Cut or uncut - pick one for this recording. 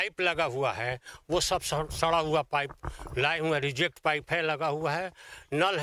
uncut